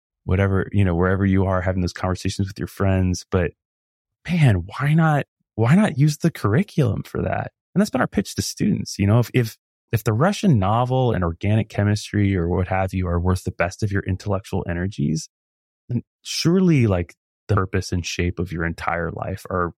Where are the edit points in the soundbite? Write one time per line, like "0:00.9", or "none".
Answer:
0:07.5